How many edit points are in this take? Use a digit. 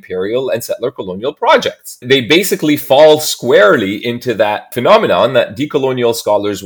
2